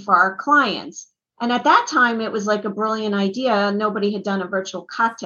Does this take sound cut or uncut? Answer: uncut